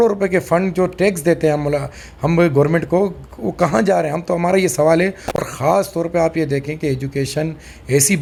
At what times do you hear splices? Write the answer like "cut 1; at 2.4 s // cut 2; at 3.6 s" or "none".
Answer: none